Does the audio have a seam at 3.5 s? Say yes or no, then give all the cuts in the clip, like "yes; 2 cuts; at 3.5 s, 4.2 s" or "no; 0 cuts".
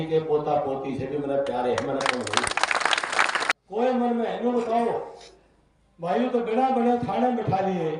yes; 1 cut; at 3.5 s